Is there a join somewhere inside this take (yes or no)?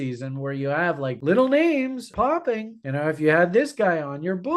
yes